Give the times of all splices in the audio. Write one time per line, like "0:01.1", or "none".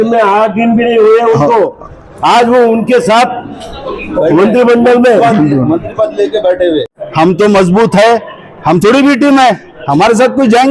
0:06.8

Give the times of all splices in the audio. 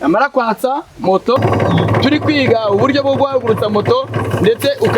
0:01.4

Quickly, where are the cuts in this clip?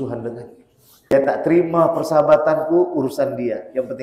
0:01.1

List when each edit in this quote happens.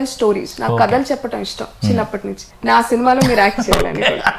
0:02.4

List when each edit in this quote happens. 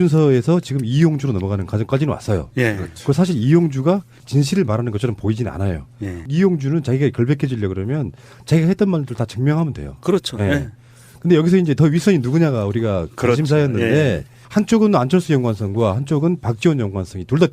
0:11.0

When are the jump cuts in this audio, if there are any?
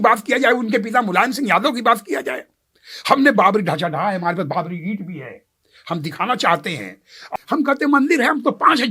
0:07.3

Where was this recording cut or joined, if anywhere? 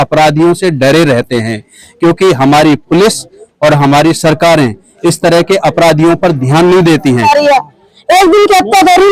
0:07.2

